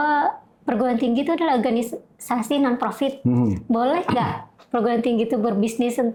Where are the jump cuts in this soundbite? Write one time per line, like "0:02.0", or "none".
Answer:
none